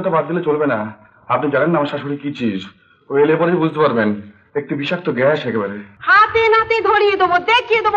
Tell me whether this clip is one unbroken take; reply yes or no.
no